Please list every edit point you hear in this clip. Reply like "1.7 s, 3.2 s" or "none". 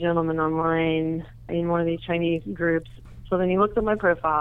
1.5 s, 3.0 s